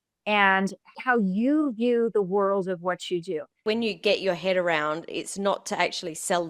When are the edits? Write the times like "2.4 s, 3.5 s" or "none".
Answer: 1.0 s, 3.6 s